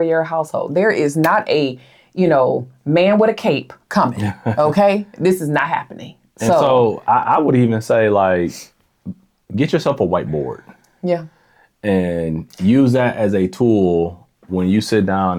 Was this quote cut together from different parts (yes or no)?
no